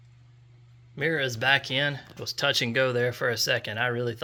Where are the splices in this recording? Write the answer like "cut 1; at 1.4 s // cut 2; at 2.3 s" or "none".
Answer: none